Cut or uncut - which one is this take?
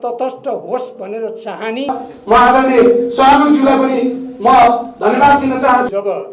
uncut